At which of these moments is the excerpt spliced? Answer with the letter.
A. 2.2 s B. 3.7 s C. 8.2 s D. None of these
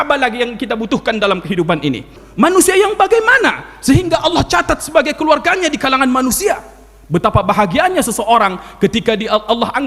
A